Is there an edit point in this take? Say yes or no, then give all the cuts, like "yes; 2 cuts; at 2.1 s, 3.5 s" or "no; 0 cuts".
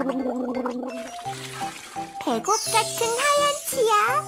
yes; 2 cuts; at 0.9 s, 2.2 s